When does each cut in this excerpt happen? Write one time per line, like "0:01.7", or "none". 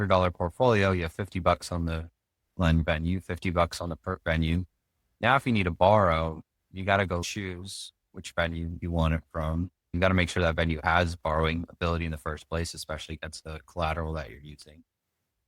0:07.2
0:09.9
0:13.4